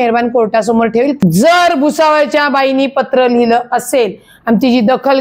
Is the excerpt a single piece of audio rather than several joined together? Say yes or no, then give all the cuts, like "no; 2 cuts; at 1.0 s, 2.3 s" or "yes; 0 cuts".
no; 1 cut; at 1.2 s